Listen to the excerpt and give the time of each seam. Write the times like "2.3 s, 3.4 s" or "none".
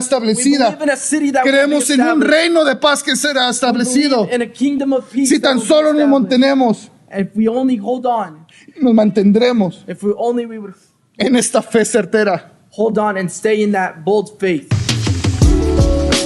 14.8 s